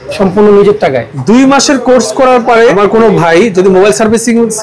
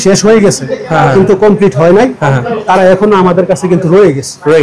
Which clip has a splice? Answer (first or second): first